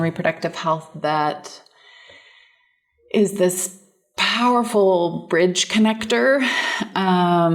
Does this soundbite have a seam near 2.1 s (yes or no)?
no